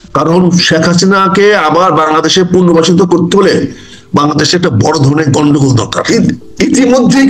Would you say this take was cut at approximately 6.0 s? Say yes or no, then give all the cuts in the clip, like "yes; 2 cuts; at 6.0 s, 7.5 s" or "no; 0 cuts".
yes; 1 cut; at 6.0 s